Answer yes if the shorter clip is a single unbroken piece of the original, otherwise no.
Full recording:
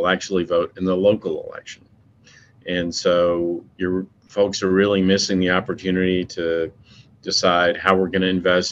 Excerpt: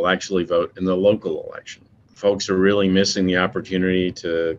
no